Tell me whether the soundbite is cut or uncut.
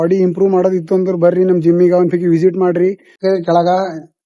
cut